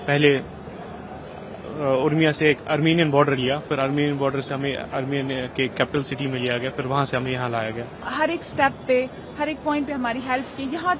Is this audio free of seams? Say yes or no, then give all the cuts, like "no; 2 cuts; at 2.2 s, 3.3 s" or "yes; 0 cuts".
no; 1 cut; at 8.0 s